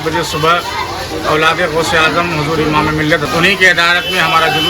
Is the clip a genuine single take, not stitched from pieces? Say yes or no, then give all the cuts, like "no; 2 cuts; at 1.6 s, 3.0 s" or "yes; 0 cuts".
no; 1 cut; at 3.2 s